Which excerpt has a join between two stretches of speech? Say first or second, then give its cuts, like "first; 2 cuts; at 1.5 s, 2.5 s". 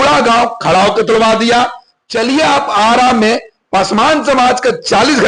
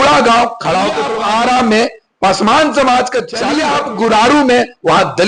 second; 2 cuts; at 1.0 s, 3.4 s